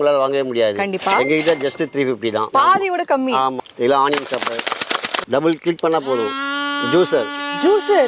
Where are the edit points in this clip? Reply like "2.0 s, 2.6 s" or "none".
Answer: 3.6 s, 5.2 s